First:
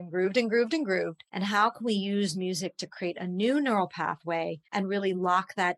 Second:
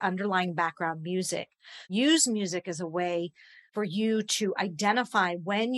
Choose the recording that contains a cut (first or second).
first